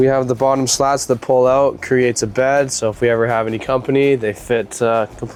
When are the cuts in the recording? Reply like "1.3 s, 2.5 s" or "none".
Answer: none